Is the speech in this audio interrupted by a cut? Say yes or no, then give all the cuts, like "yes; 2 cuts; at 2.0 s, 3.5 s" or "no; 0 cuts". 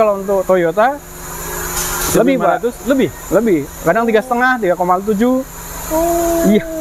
no; 0 cuts